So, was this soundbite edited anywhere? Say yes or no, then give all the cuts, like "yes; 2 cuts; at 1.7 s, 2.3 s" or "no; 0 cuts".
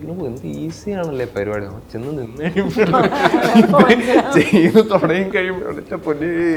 no; 0 cuts